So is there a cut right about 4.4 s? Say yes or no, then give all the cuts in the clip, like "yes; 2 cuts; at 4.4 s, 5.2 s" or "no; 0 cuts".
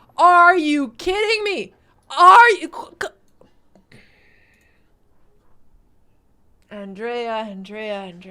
no; 1 cut; at 6.6 s